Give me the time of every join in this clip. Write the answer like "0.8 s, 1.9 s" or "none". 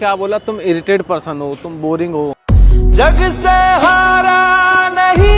none